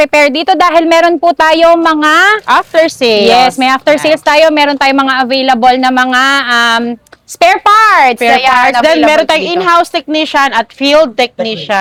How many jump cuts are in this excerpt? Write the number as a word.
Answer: zero